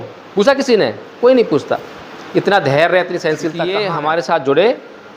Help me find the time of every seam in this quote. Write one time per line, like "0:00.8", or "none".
0:03.8